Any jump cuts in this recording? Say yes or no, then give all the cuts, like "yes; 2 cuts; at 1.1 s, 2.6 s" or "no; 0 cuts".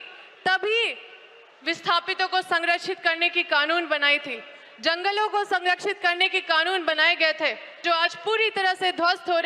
yes; 1 cut; at 7.8 s